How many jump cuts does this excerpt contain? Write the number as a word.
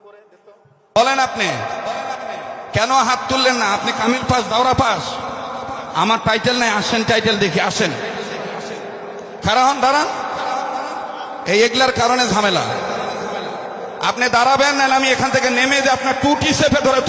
one